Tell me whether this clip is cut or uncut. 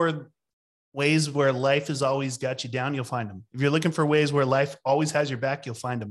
uncut